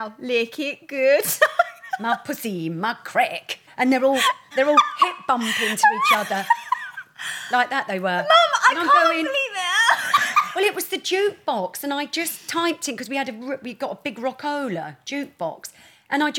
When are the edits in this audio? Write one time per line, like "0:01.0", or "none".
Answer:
0:03.7
0:04.5